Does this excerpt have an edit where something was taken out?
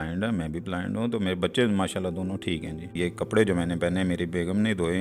yes; 1 cut; at 2.9 s

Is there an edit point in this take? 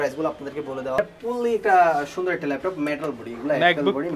yes; 1 cut; at 1.0 s

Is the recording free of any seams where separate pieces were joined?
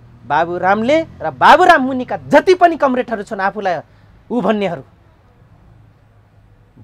yes; 0 cuts

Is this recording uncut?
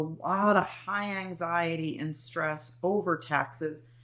yes; 0 cuts

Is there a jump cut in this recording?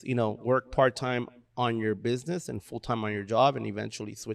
no; 0 cuts

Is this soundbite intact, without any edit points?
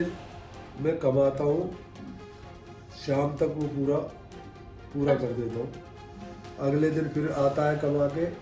yes; 0 cuts

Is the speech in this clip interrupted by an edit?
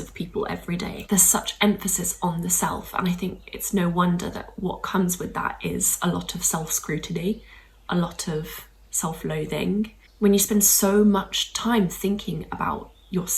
yes; 2 cuts; at 1.0 s, 10.0 s

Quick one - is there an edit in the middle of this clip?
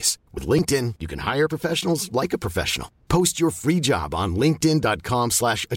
no; 0 cuts

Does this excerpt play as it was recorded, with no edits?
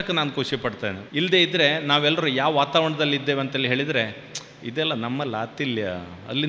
no; 1 cut; at 1.0 s

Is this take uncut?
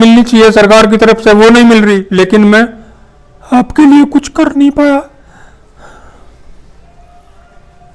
no; 1 cut; at 2.1 s

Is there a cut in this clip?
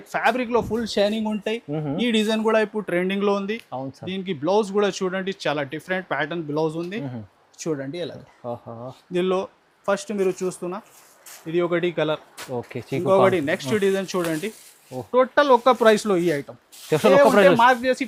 no; 0 cuts

